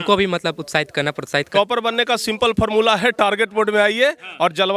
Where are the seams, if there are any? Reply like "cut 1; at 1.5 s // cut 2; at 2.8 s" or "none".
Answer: cut 1; at 1.5 s